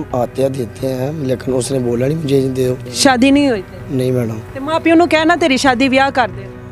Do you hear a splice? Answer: yes; 1 cut; at 2.9 s

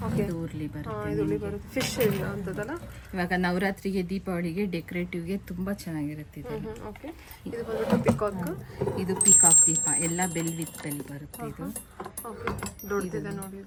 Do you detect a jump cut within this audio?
no; 0 cuts

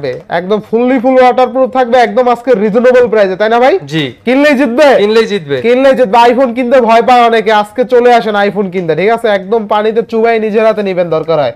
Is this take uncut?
yes; 0 cuts

